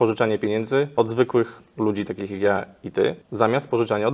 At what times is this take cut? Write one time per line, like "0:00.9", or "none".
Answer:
0:00.9
0:03.2